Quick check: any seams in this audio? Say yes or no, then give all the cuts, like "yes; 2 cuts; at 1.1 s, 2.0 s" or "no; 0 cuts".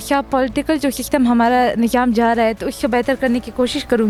no; 0 cuts